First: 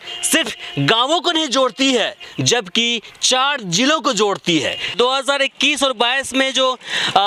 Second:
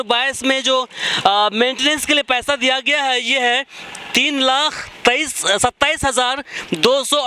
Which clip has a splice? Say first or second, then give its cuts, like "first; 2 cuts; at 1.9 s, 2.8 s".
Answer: first; 1 cut; at 4.9 s